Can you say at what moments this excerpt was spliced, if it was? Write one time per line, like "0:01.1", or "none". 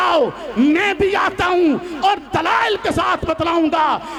none